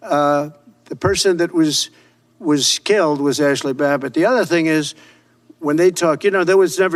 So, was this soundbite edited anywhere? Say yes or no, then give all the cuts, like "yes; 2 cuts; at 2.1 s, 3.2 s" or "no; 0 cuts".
no; 0 cuts